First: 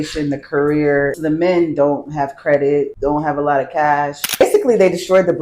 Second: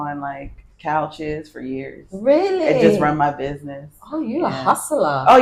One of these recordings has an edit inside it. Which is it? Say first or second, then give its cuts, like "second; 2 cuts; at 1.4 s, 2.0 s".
first; 3 cuts; at 1.2 s, 2.9 s, 4.4 s